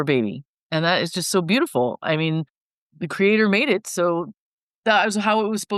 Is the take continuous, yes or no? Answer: yes